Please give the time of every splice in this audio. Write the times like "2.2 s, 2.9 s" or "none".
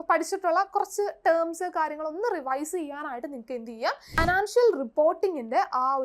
4.2 s